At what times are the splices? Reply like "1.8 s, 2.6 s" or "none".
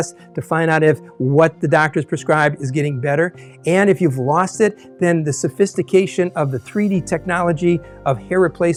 none